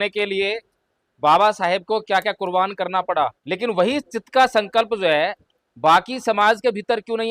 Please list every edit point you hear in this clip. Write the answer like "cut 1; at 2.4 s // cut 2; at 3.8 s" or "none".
cut 1; at 3.4 s